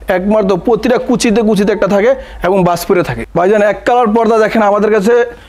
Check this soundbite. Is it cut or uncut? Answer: uncut